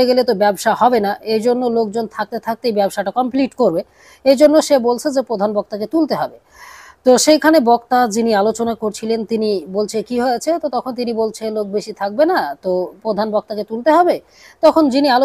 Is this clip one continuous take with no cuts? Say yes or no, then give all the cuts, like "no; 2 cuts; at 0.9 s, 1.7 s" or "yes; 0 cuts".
yes; 0 cuts